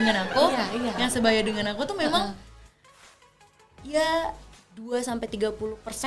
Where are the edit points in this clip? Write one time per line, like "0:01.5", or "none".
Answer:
none